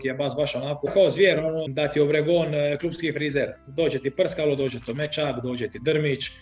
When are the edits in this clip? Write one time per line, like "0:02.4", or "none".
0:00.9
0:01.7
0:03.6